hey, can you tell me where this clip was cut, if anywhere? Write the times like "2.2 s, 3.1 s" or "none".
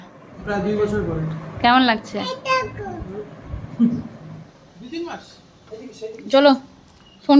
4.9 s

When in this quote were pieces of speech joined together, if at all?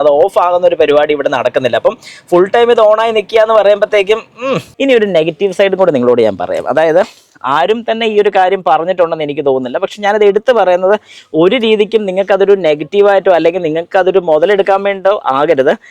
4.6 s

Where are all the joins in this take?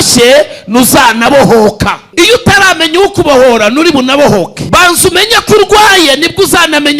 2.0 s, 4.6 s

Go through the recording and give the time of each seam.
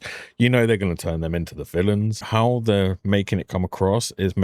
2.2 s

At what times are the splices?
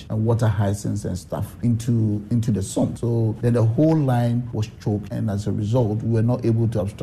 none

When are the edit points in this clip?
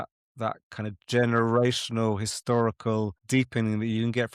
none

